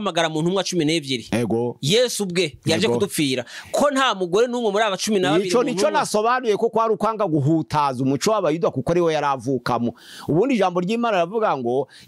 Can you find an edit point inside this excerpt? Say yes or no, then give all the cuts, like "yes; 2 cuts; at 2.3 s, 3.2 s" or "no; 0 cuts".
no; 0 cuts